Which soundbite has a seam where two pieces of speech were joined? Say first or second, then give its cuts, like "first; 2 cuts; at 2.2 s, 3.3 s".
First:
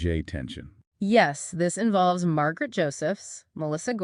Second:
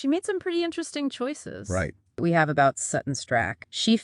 second; 1 cut; at 2.2 s